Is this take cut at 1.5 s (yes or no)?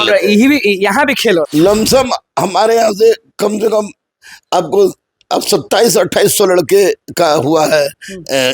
yes